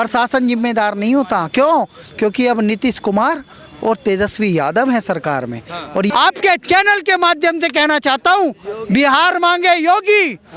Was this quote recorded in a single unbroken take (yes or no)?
no